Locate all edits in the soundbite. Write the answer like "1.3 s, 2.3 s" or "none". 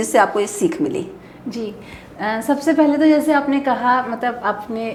none